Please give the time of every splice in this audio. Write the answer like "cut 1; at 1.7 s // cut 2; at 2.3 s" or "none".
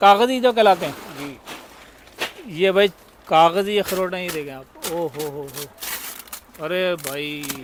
none